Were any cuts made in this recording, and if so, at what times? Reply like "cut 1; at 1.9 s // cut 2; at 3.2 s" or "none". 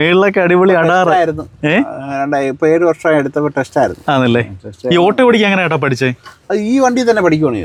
none